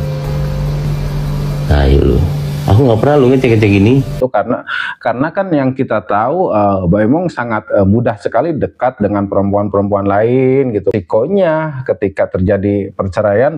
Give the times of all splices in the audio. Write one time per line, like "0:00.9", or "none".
0:04.2
0:10.9

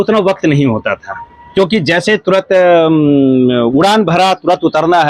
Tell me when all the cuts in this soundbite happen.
none

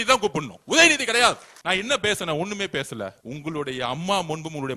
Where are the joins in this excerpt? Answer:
0:01.5
0:03.2

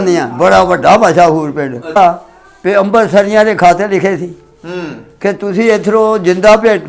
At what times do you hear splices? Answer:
0:02.0

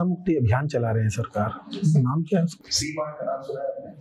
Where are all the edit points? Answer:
0:02.6

